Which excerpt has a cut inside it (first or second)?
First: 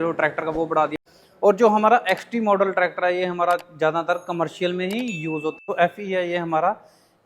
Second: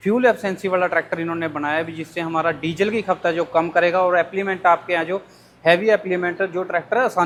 first